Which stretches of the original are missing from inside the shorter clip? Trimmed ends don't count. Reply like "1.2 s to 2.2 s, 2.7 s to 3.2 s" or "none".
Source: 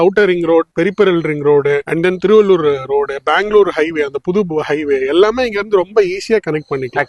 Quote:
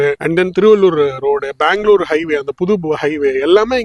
none